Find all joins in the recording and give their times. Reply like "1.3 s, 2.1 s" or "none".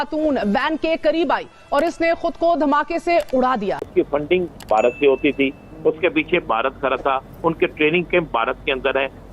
3.8 s